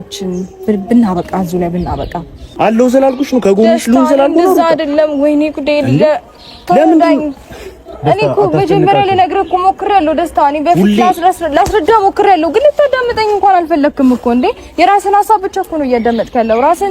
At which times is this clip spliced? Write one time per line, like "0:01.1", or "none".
0:02.4